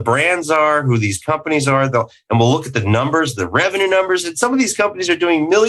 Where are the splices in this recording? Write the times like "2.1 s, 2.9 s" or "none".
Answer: none